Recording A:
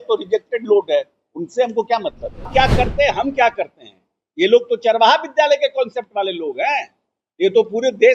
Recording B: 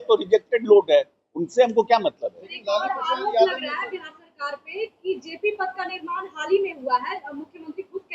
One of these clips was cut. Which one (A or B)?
A